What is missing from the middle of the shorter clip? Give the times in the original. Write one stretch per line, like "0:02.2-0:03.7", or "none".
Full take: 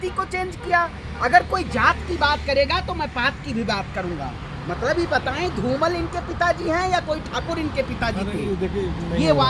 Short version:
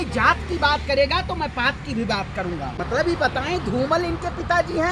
0:04.4-0:04.7